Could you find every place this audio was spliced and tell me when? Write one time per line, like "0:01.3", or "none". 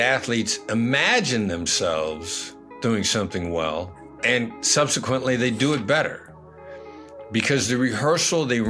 none